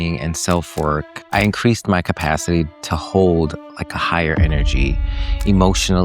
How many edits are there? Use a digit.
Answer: 1